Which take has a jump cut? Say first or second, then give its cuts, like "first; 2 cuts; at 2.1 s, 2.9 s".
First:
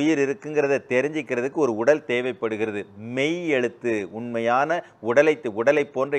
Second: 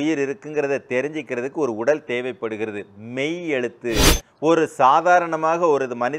second; 1 cut; at 4.1 s